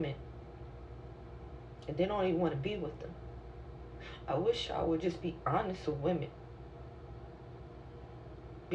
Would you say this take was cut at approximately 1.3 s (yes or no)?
yes